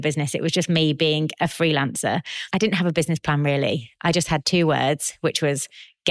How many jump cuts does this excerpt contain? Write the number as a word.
one